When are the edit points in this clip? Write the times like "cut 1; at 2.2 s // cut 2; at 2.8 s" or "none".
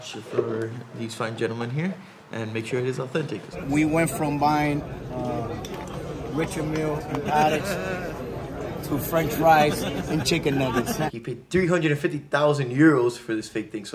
cut 1; at 3.6 s // cut 2; at 11.1 s